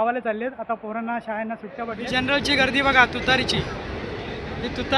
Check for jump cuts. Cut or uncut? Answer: cut